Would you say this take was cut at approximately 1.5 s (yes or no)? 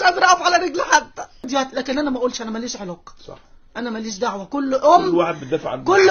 yes